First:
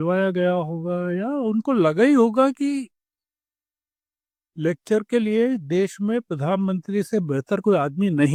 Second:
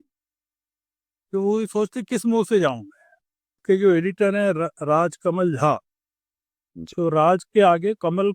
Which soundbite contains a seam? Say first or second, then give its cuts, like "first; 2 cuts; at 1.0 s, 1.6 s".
second; 1 cut; at 3.6 s